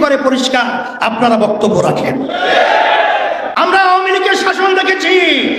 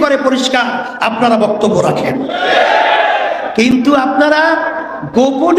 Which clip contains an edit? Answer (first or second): first